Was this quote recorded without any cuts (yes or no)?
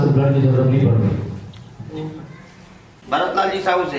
no